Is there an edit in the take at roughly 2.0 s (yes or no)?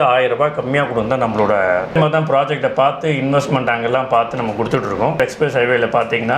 yes